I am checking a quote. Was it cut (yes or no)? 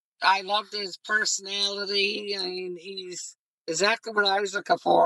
no